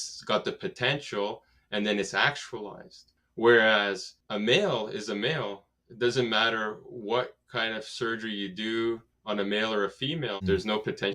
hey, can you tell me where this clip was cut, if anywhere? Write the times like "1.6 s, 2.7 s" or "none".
9.1 s, 10.4 s